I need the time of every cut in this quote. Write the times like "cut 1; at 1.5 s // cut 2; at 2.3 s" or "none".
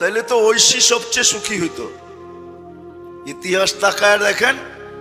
cut 1; at 1.9 s // cut 2; at 3.3 s